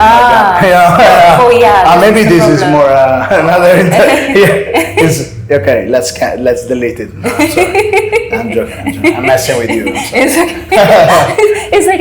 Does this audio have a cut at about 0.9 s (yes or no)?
no